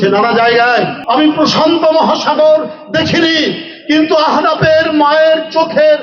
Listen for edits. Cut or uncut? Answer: cut